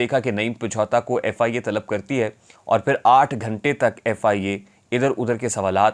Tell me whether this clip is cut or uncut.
uncut